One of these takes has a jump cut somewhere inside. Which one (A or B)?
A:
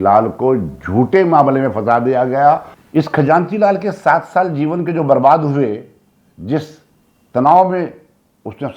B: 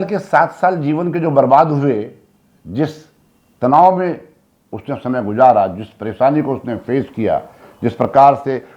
A